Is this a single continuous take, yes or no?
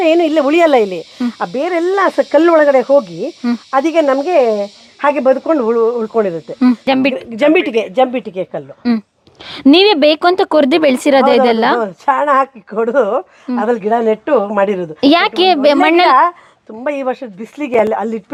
yes